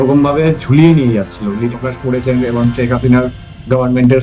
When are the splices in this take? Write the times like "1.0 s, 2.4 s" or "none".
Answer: 1.7 s